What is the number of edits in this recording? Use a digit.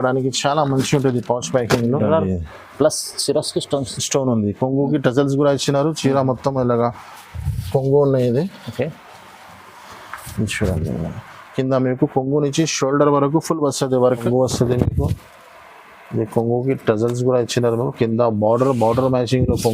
2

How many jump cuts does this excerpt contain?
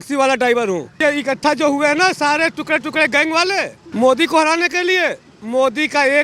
2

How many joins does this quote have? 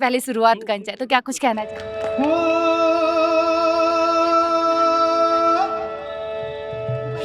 1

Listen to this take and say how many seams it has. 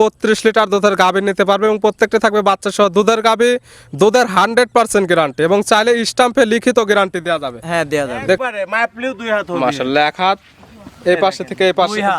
1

